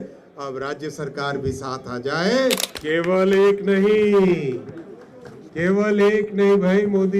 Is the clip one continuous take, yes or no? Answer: no